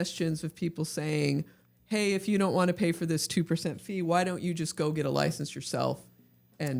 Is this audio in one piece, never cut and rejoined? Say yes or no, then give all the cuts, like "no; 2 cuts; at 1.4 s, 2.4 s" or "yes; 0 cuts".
yes; 0 cuts